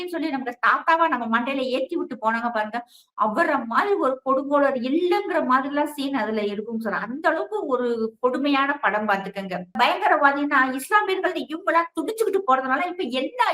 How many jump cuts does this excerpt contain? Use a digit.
1